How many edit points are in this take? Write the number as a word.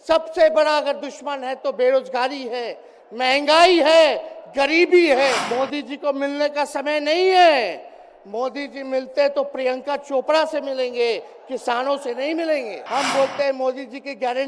two